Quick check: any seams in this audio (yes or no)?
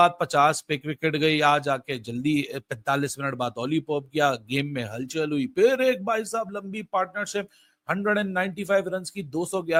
no